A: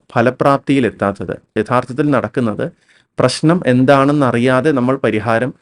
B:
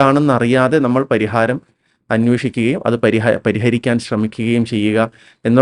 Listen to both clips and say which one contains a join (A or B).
A